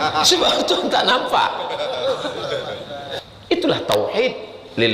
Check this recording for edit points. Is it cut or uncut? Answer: cut